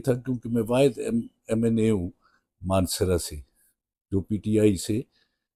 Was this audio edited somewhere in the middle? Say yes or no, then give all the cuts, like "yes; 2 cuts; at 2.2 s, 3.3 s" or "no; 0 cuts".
no; 0 cuts